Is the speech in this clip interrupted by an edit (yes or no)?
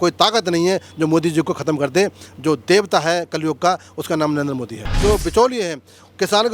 yes